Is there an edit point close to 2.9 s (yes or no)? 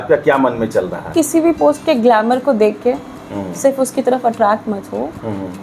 no